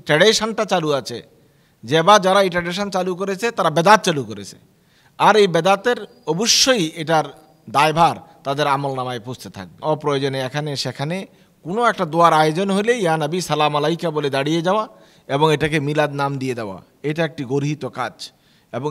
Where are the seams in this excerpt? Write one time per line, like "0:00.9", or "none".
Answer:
0:09.7